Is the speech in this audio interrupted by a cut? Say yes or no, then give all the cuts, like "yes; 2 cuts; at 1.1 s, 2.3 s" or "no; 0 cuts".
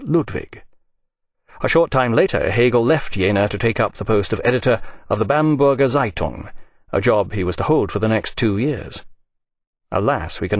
no; 0 cuts